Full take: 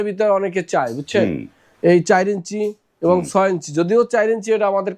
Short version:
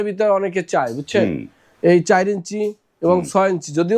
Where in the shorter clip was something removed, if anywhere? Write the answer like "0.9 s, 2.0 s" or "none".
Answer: none